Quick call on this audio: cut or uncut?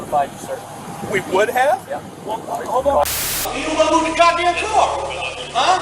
cut